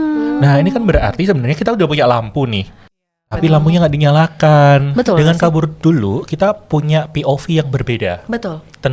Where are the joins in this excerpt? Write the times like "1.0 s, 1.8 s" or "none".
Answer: 4.9 s

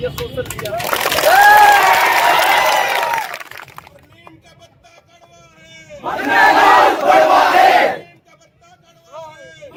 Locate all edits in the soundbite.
none

